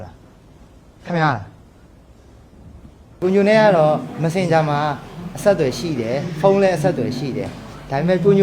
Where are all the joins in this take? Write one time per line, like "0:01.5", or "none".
0:03.2